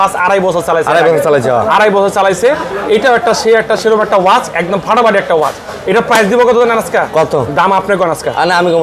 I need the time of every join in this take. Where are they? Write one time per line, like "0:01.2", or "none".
none